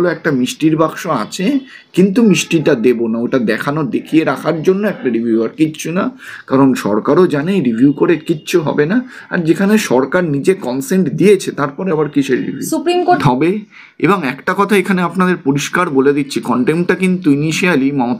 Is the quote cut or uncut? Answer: cut